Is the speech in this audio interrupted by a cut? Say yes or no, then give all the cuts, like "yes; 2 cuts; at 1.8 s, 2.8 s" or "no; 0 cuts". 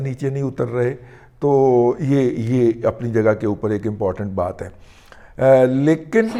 no; 0 cuts